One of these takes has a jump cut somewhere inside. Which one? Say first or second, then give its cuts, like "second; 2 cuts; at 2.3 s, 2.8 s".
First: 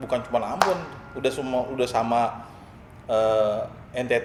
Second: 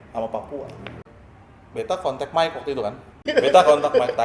second; 2 cuts; at 1.2 s, 3.1 s